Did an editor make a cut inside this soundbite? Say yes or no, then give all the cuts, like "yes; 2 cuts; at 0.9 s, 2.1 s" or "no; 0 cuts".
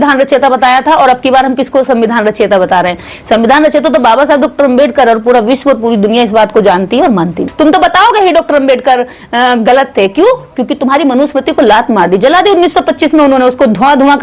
yes; 1 cut; at 7.4 s